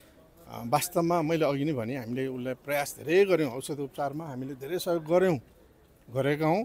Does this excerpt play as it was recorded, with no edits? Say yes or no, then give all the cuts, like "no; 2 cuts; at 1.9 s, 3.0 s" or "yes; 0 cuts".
yes; 0 cuts